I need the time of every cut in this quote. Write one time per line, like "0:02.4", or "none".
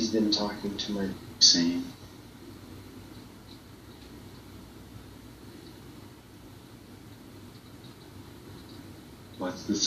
none